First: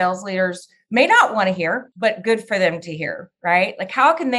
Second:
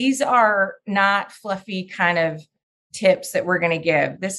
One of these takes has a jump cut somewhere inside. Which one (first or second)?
first